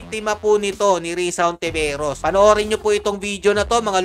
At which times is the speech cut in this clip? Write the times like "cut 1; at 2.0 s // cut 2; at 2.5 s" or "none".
none